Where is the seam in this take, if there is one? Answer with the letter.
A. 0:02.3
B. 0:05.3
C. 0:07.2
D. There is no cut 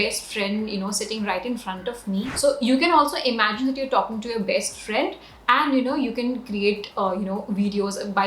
A